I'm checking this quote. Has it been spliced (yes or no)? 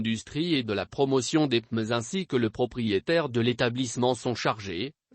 yes